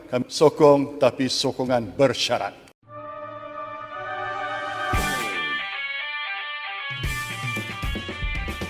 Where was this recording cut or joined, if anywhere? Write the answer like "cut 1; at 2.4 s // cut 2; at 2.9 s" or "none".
cut 1; at 2.6 s